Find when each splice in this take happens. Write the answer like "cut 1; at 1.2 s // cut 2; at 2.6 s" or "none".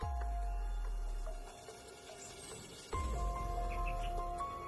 none